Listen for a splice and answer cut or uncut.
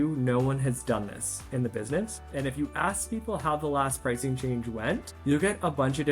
cut